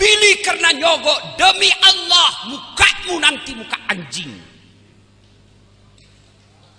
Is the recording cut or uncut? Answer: uncut